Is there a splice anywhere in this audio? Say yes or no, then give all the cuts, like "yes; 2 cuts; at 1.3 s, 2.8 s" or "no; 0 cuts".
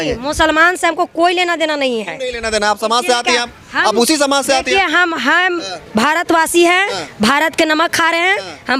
no; 0 cuts